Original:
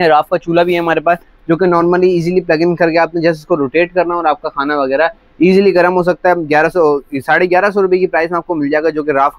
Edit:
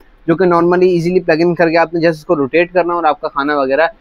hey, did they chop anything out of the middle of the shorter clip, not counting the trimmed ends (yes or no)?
no